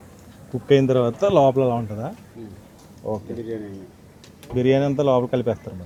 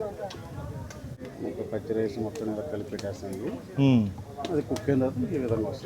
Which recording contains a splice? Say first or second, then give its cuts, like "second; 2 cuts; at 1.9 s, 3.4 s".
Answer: second; 1 cut; at 1.2 s